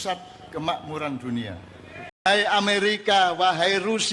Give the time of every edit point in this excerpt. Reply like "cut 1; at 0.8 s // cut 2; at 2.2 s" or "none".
cut 1; at 2.1 s

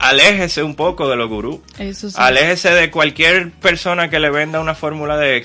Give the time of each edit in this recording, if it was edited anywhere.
none

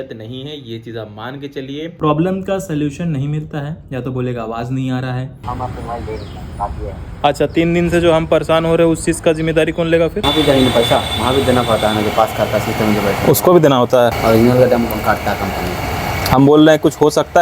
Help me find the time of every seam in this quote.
cut 1; at 2.0 s // cut 2; at 5.4 s // cut 3; at 10.2 s // cut 4; at 14.2 s

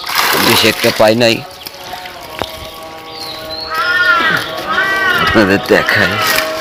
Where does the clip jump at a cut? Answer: none

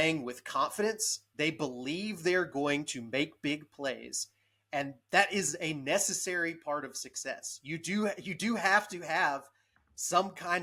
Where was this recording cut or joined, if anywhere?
none

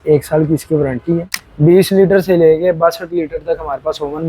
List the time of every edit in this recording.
cut 1; at 1.4 s

